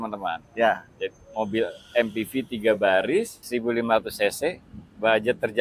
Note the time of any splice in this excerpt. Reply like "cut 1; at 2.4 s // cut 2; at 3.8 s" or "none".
cut 1; at 3.4 s